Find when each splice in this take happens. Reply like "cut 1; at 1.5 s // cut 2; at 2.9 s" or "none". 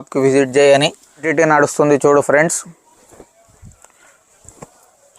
cut 1; at 1.3 s